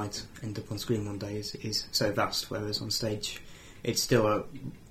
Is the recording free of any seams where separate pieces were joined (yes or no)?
yes